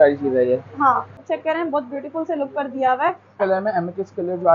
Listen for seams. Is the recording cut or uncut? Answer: cut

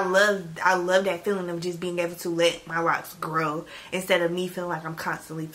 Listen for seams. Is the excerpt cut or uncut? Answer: uncut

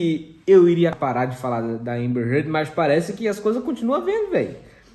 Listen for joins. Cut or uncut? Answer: cut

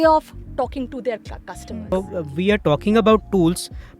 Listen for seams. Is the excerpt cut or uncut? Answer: cut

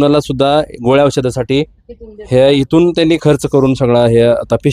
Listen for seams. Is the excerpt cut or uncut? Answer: uncut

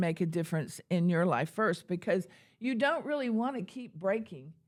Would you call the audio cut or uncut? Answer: uncut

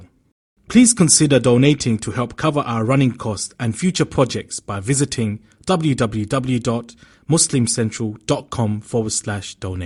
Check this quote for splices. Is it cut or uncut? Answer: uncut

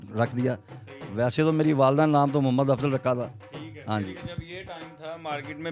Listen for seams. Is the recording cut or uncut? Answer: uncut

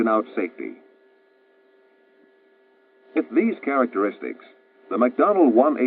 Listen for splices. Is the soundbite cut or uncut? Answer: uncut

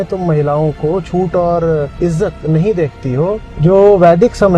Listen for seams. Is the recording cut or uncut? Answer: cut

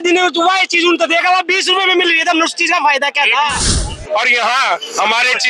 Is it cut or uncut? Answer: cut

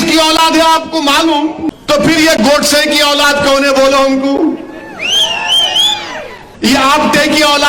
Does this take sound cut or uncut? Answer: cut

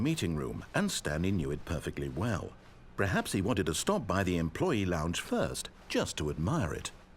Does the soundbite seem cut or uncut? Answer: uncut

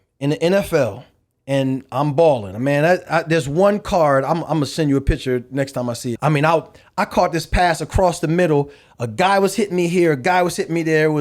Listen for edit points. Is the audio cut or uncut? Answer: cut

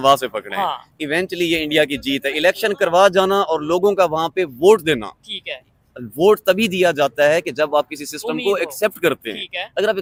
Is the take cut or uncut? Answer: uncut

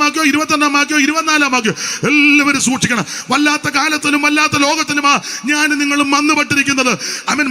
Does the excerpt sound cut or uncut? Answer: uncut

